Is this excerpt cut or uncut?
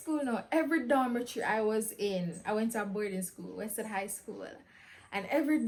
uncut